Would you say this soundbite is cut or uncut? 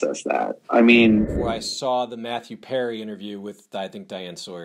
cut